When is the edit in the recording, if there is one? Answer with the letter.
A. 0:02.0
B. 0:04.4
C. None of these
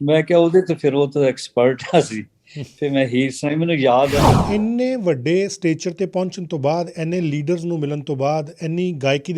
B